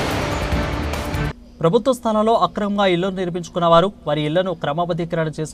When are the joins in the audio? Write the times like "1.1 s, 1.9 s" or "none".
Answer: 0.9 s